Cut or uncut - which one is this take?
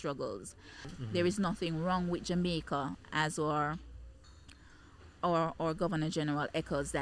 cut